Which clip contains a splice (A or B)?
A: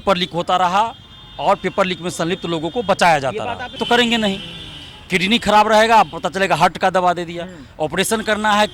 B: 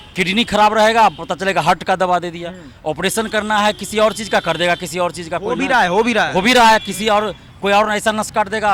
A